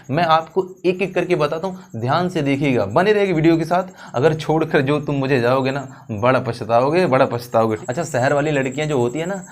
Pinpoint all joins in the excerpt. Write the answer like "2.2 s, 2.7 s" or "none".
7.8 s